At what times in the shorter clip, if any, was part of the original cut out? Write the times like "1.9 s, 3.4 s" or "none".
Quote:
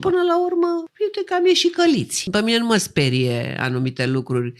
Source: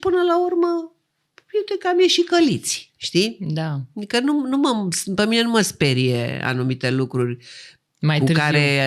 0.9 s, 2.2 s